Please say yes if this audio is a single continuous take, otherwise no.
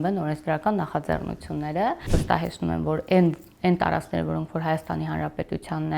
no